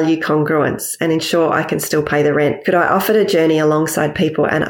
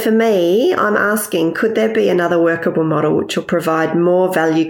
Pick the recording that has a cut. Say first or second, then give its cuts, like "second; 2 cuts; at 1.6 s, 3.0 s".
first; 1 cut; at 2.6 s